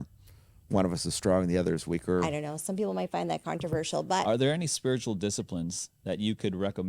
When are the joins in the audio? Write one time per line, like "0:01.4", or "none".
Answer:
0:02.3
0:04.2